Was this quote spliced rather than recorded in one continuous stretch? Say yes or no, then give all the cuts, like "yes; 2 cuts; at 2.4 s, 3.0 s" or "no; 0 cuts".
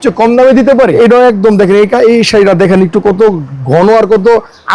yes; 1 cut; at 1.0 s